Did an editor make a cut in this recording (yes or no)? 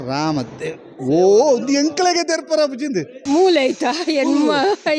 yes